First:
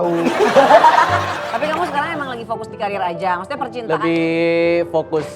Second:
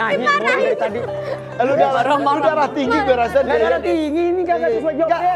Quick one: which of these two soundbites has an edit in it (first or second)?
first